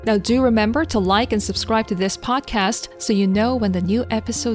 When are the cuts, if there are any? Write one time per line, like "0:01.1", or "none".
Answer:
0:02.9

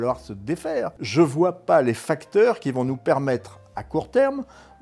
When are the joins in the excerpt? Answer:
0:01.0

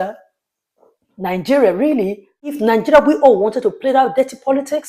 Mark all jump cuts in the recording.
0:02.6

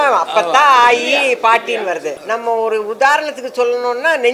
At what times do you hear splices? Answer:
0:02.2

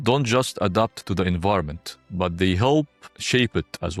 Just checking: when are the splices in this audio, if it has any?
none

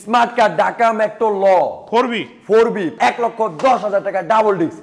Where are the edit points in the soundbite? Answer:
0:02.9

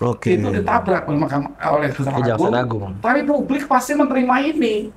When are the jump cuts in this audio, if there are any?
none

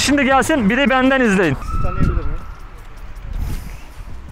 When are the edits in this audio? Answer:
0:01.7

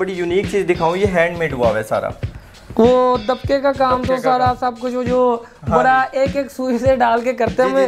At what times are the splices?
none

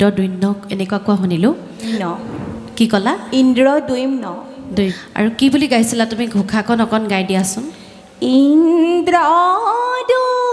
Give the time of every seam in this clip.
0:01.9
0:05.0

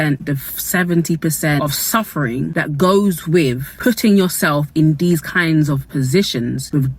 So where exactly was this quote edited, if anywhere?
0:01.6
0:05.9

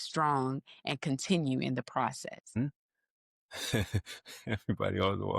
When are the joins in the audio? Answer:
0:02.6

